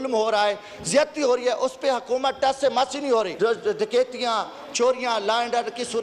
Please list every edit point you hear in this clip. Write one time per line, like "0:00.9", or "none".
0:03.3

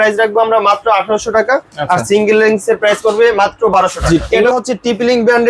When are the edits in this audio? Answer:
0:04.3

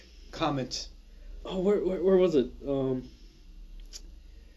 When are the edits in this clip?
0:03.1

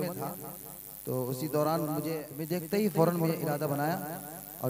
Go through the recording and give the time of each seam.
0:02.3

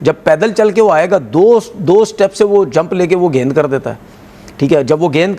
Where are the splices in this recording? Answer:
none

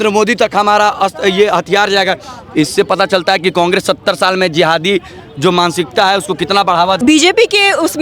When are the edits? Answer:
0:07.0

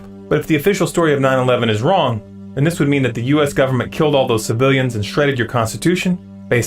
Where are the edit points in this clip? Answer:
0:03.9

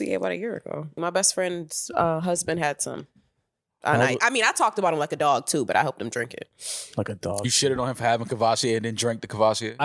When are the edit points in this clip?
0:00.9

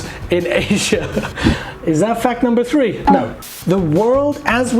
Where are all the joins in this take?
0:03.4

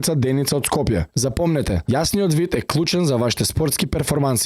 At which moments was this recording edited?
0:01.1

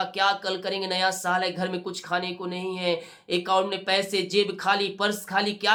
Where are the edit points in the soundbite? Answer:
none

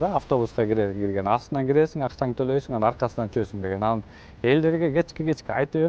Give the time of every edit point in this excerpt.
none

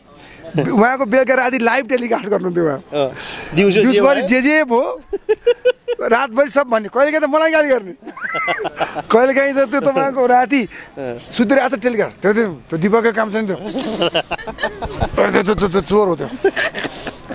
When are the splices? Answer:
none

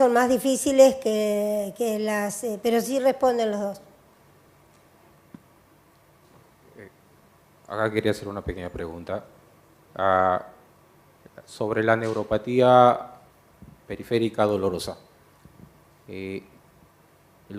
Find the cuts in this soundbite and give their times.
0:14.3

